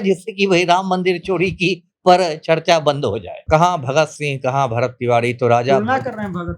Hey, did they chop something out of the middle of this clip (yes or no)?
yes